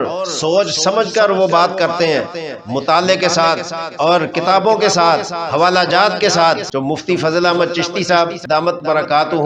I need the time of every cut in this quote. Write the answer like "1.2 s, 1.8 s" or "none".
6.7 s, 8.4 s